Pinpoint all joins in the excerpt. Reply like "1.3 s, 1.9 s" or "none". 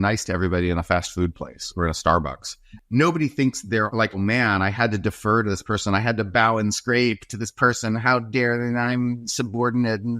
2.7 s

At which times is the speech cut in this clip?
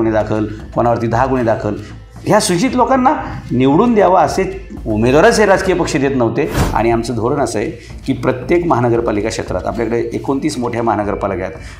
6.6 s

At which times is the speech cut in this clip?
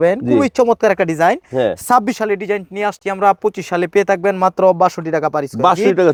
none

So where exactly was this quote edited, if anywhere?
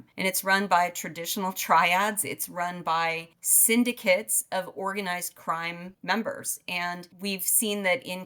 none

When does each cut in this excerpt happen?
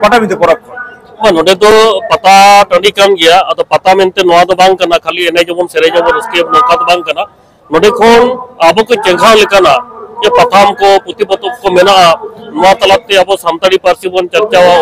none

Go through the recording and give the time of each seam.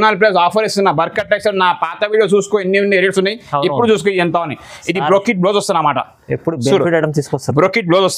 none

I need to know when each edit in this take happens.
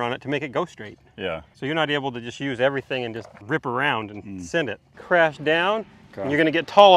1.5 s, 3.3 s, 5.0 s

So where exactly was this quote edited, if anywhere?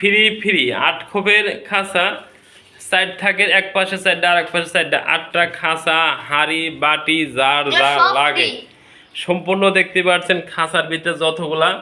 none

